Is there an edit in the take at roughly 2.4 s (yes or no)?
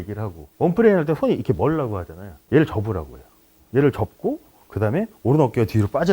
yes